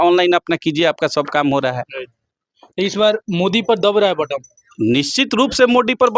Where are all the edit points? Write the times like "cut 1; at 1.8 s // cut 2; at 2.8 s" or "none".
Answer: none